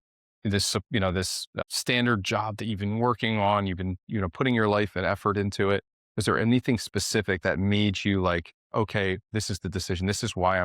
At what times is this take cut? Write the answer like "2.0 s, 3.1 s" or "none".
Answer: 1.5 s, 9.2 s